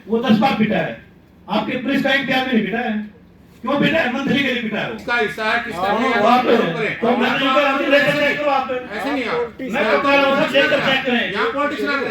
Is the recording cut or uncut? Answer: cut